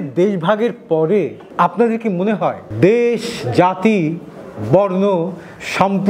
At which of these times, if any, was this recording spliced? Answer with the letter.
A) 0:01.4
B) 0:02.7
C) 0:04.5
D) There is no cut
A